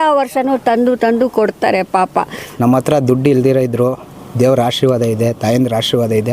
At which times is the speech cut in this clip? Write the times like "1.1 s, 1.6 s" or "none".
2.4 s

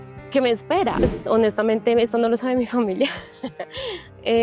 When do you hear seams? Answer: 1.0 s

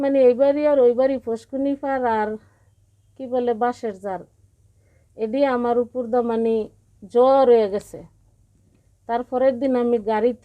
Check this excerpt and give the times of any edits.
none

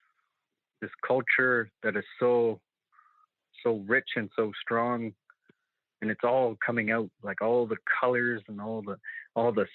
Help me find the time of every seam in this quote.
none

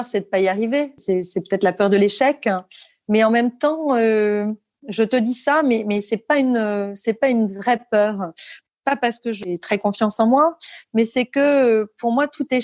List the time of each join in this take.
1.0 s, 8.5 s, 9.5 s

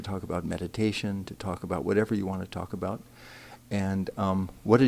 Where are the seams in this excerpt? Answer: 3.0 s

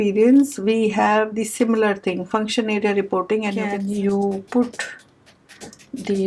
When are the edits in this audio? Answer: 3.6 s

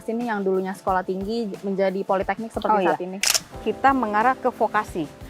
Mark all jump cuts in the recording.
3.2 s

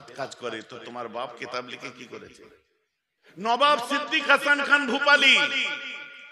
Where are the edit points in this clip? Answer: 3.2 s

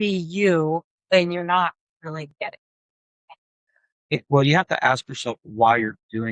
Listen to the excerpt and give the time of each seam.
2.3 s

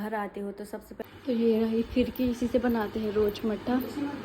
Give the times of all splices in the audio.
1.0 s

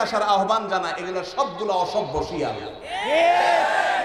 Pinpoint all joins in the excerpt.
none

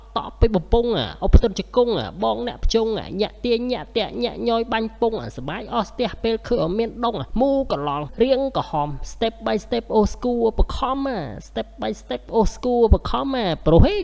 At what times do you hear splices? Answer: none

